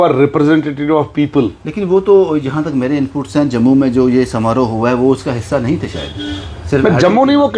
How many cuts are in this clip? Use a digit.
0